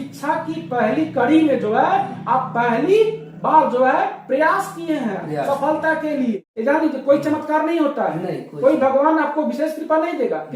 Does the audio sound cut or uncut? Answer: cut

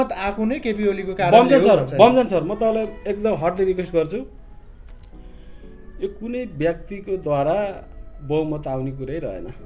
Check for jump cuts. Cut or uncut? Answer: uncut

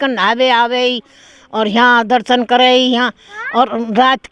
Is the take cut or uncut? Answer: uncut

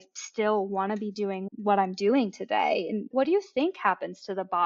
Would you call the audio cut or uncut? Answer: cut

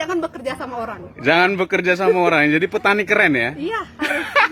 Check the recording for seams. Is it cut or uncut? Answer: uncut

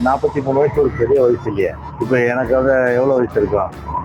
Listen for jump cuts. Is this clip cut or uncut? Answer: cut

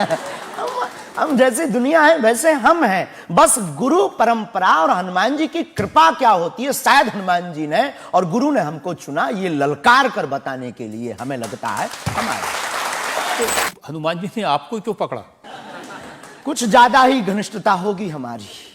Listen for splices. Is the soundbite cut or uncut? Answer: cut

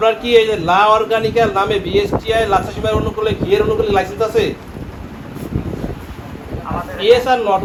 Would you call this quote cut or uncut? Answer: uncut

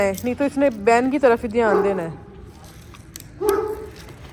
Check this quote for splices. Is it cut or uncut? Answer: uncut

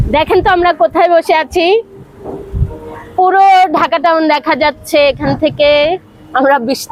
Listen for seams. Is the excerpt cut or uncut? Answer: uncut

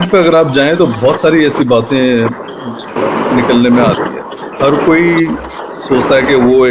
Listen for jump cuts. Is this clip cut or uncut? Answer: uncut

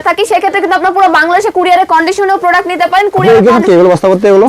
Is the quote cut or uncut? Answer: uncut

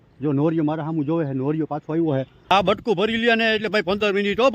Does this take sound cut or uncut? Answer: cut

